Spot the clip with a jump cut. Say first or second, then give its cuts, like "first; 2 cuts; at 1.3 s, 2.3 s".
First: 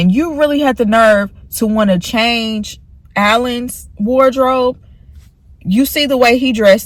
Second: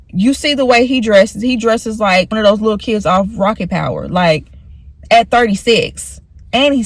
second; 1 cut; at 2.3 s